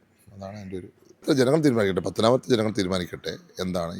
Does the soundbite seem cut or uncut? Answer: cut